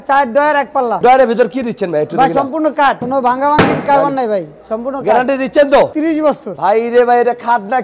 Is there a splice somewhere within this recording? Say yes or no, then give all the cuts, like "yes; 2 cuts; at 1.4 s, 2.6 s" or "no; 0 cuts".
yes; 3 cuts; at 1.0 s, 3.0 s, 6.2 s